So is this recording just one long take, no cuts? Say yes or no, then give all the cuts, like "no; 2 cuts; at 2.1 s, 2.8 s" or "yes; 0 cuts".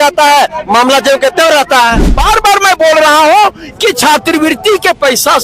no; 1 cut; at 2.1 s